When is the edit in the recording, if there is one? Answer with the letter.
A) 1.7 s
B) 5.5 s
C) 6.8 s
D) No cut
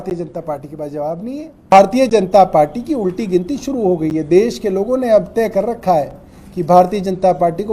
A